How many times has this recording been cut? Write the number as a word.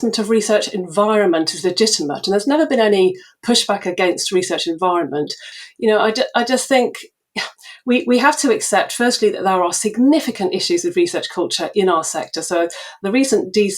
one